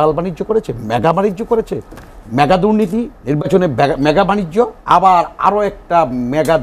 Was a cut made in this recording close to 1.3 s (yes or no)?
no